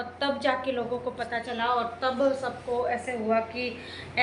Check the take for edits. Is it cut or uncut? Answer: uncut